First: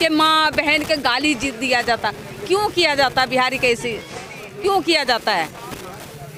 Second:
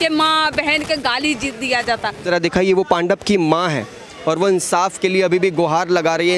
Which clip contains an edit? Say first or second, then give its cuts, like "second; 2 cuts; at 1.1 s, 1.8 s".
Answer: second; 1 cut; at 2.2 s